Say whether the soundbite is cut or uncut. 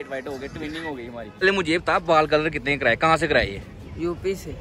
cut